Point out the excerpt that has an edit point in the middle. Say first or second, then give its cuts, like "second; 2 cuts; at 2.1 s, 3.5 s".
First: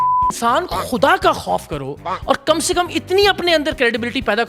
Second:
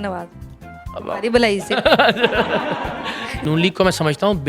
second; 1 cut; at 3.4 s